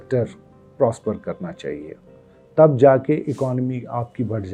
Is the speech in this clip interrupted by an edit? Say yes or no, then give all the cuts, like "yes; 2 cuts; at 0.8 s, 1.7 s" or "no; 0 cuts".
no; 0 cuts